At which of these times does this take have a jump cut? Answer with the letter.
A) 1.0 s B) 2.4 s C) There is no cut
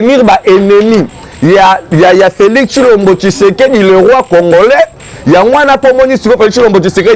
C